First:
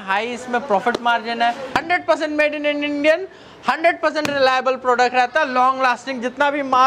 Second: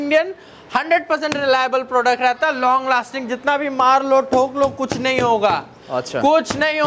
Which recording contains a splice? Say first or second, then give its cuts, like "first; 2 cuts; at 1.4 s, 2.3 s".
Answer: first; 1 cut; at 1.7 s